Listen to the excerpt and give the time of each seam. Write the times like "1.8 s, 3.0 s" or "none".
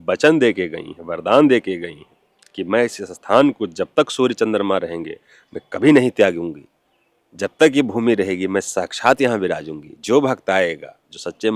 none

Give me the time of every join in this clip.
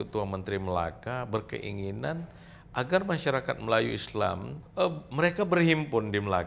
4.6 s

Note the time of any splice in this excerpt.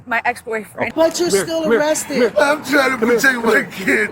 0.9 s

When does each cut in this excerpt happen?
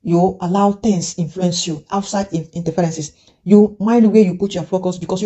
none

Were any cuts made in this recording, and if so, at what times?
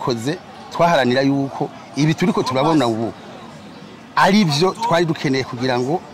none

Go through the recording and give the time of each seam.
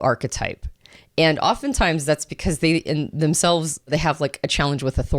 3.9 s

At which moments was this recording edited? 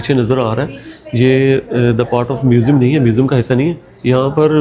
none

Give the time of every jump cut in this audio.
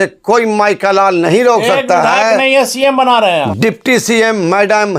3.4 s

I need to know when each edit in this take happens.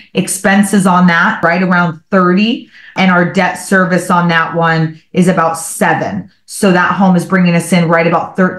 1.4 s, 2.9 s

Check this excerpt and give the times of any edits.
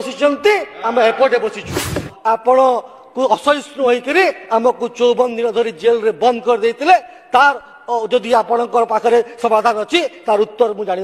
2.1 s

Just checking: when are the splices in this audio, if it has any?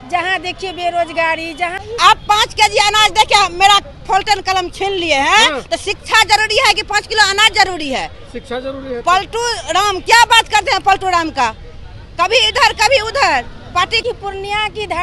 1.8 s, 14.0 s

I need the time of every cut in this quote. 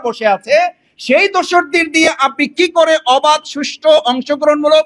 none

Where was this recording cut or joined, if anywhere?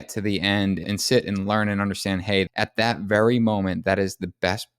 0.8 s, 2.5 s

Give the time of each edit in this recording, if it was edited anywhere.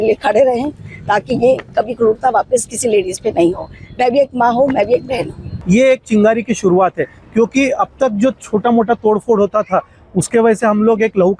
5.5 s

